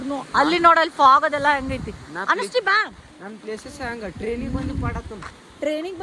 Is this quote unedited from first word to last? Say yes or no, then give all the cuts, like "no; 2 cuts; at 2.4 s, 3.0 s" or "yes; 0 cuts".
yes; 0 cuts